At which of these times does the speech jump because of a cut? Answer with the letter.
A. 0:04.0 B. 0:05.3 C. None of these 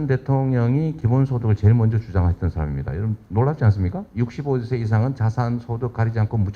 A